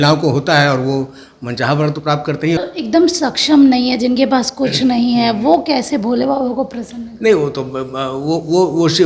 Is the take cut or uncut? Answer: cut